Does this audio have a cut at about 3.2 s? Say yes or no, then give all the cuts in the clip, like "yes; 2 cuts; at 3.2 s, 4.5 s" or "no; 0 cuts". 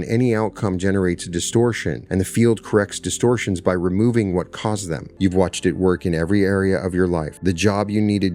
no; 3 cuts; at 1.9 s, 5.0 s, 7.3 s